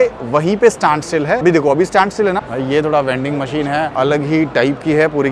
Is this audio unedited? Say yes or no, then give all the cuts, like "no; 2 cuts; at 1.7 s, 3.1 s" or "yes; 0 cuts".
no; 3 cuts; at 1.4 s, 2.5 s, 3.9 s